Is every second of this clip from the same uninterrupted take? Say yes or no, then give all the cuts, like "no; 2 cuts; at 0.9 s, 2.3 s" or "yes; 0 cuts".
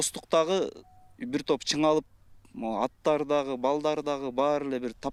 yes; 0 cuts